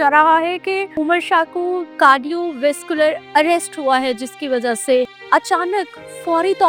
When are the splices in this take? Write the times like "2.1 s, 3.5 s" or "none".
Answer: 1.0 s, 1.9 s, 3.2 s, 5.2 s